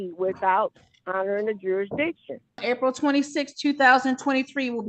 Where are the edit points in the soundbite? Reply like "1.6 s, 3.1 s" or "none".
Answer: 2.6 s